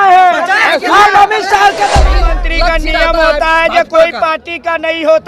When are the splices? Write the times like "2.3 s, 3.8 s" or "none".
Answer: 2.1 s